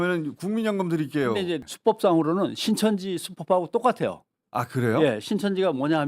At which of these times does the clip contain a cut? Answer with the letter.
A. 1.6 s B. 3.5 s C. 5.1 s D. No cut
A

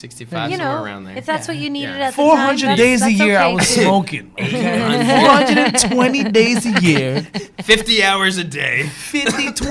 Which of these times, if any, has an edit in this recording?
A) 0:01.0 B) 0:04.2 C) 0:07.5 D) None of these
D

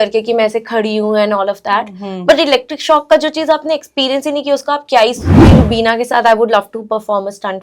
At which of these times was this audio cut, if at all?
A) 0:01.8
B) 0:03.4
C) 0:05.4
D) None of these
C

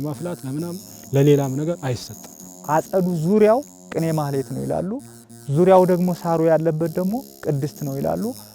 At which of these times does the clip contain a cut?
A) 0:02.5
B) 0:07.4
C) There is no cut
A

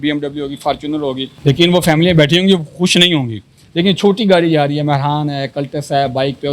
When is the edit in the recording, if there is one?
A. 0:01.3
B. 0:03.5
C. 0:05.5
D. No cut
A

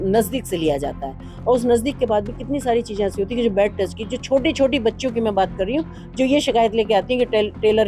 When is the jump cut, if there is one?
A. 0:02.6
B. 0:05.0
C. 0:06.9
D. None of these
D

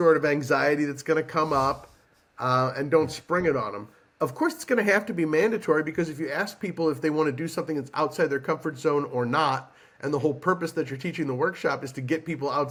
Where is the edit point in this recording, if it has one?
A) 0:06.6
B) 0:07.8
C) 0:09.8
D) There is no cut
D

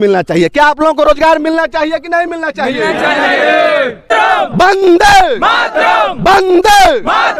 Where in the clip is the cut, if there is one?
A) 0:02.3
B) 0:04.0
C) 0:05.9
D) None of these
B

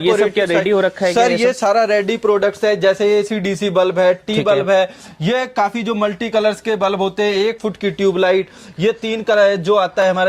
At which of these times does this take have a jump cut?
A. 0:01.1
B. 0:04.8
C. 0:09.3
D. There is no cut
D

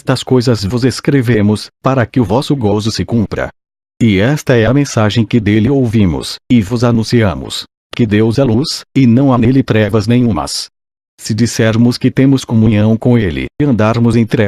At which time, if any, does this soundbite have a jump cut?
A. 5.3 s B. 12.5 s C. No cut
A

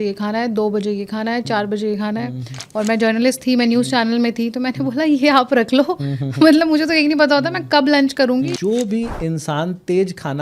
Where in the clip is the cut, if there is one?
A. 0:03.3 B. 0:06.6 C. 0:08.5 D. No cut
C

